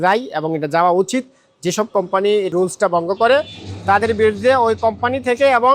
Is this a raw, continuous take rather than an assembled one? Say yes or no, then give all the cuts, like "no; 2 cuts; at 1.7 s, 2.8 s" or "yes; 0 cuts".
no; 1 cut; at 2.5 s